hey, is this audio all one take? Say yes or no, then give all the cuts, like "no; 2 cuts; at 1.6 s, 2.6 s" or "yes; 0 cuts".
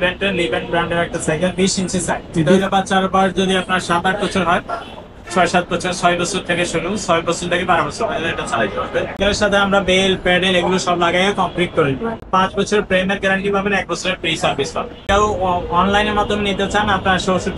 no; 3 cuts; at 9.2 s, 12.2 s, 15.0 s